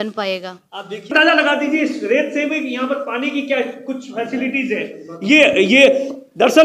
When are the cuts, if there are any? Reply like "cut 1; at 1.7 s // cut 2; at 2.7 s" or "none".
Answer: cut 1; at 1.1 s